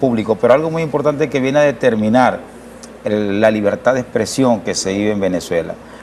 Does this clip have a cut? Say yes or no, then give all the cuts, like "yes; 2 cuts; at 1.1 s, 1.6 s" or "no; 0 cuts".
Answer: yes; 1 cut; at 2.8 s